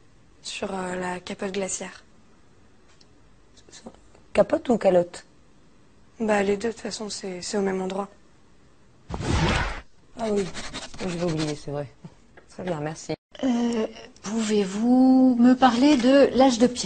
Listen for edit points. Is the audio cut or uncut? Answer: cut